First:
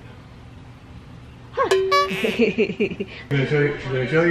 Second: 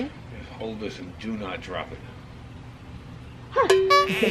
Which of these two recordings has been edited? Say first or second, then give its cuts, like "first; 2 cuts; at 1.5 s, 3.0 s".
first; 1 cut; at 3.3 s